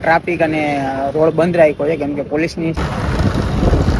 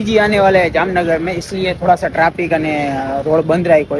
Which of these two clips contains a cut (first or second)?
first